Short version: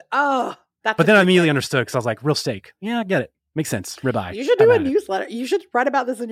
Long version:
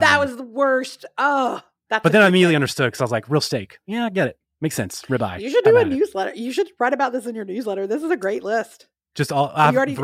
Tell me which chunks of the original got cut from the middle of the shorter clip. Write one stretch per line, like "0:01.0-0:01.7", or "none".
none